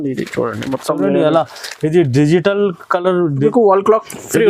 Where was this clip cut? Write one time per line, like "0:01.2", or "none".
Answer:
0:03.4